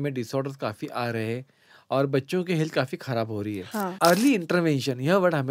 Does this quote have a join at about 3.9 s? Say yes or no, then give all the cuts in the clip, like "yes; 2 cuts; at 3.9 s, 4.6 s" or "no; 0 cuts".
yes; 1 cut; at 3.9 s